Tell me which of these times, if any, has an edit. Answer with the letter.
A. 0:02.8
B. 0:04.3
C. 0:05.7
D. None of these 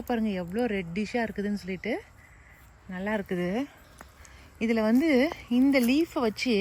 D